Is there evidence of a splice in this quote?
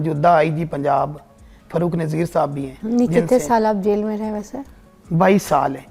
no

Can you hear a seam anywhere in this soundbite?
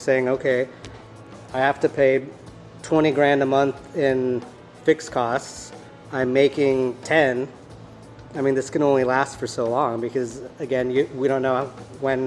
no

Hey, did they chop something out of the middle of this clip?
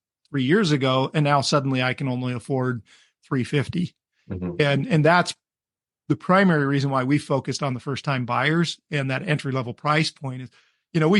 no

